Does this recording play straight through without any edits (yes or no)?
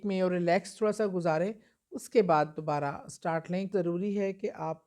no